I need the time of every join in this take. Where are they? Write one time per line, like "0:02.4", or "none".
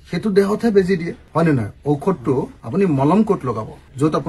none